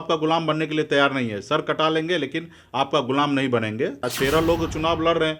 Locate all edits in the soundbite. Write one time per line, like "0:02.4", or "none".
0:04.1

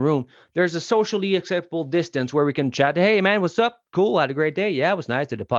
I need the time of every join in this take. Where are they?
none

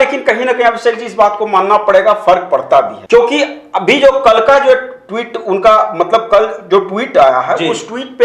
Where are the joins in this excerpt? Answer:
0:03.0

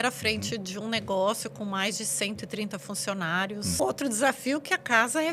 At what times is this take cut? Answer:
0:03.8

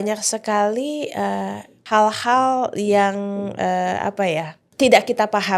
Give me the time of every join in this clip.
0:01.7
0:04.6

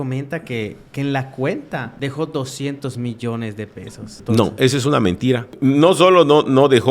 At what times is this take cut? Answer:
0:01.9
0:04.1
0:05.5

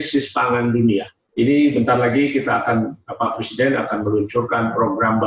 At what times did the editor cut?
0:01.2

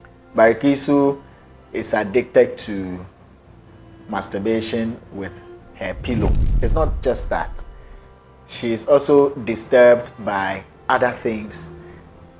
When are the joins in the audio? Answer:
0:06.4

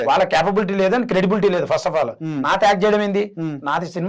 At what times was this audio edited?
none

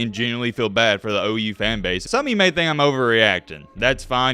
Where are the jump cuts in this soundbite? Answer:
0:02.0

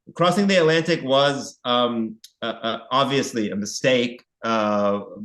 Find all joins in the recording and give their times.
none

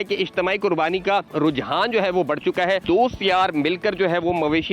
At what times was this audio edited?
0:01.3
0:02.8

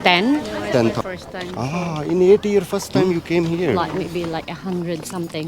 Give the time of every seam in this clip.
0:01.0
0:03.8

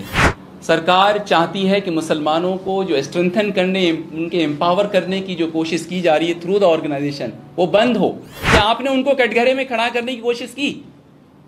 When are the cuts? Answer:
0:08.3

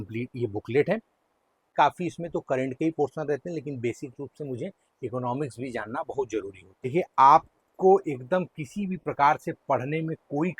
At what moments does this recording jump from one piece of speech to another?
0:01.7
0:06.9

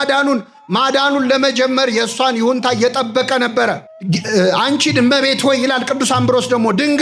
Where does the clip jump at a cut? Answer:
0:04.3

